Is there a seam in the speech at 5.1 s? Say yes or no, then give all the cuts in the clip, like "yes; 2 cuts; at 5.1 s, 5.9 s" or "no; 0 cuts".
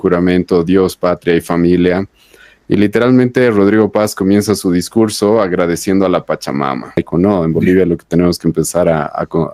no; 1 cut; at 7.0 s